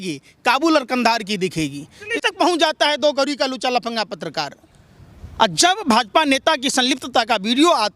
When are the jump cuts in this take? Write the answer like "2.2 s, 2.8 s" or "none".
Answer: 2.1 s